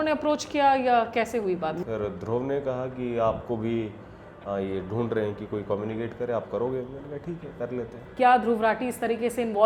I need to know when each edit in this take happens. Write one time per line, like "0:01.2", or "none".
0:01.8
0:08.1

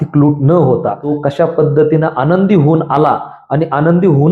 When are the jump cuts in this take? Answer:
0:01.0

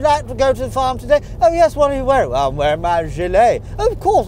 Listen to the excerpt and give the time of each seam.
none

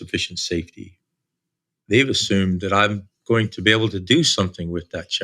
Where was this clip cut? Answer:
none

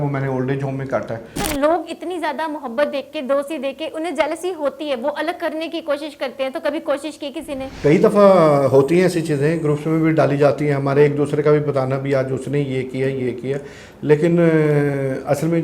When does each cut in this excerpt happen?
0:01.3
0:07.7

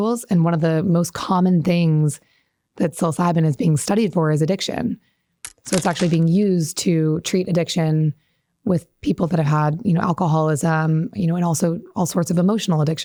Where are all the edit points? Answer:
none

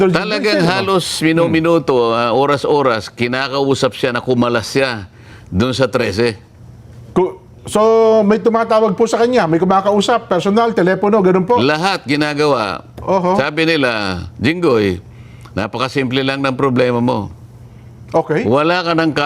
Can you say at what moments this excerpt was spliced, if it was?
0:06.1

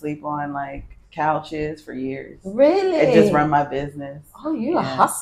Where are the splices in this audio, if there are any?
none

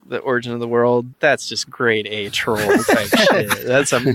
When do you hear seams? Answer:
0:01.1

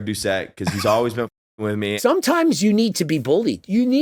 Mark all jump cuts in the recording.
0:01.9

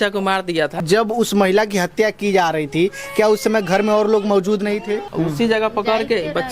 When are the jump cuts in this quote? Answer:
0:00.8
0:05.1

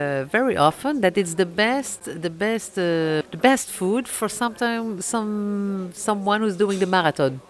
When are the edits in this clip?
0:03.3

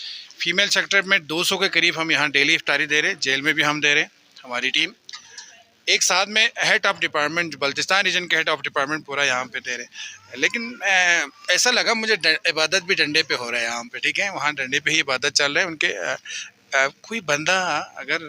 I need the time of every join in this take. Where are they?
none

